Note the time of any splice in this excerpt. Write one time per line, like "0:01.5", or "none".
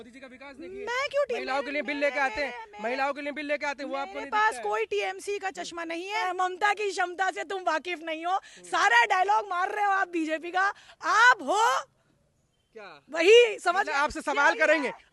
0:06.2

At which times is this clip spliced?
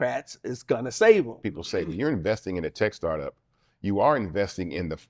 0:01.4

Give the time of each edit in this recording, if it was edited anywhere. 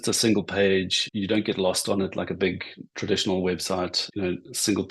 0:01.0
0:04.0

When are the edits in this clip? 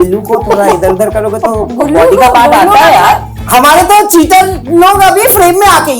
0:03.4

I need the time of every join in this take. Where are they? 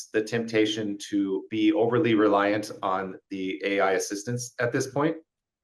0:01.5

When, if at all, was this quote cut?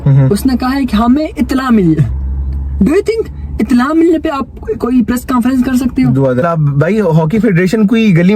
0:06.4

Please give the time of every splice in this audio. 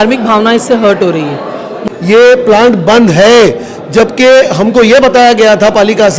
0:01.7

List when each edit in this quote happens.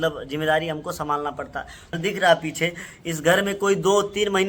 0:02.0

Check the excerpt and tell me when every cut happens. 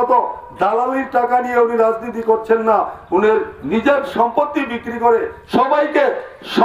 0:05.4

